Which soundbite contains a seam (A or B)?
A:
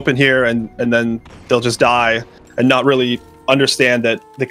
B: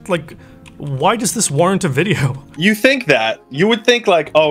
B